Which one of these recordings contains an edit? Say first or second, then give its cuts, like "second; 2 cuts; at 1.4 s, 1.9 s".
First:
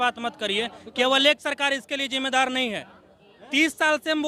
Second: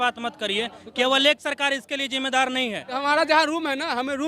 second; 1 cut; at 3.0 s